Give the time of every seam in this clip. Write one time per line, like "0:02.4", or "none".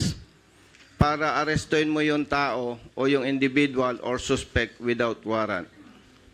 none